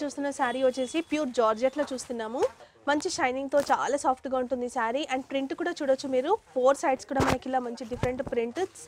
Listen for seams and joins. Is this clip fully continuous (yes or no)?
no